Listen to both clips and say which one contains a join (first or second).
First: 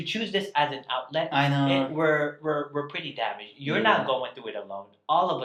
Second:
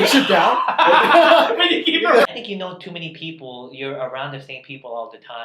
second